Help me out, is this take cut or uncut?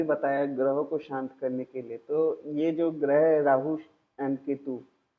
uncut